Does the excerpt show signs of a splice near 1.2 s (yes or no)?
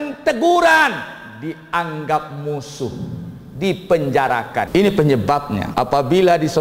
no